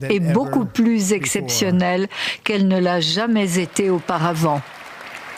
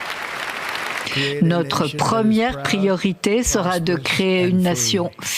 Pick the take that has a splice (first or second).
second